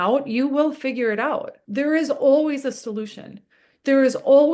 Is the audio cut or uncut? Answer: cut